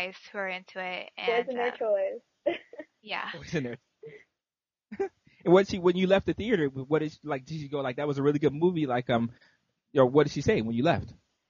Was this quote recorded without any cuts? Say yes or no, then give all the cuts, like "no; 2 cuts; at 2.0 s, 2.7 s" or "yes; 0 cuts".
yes; 0 cuts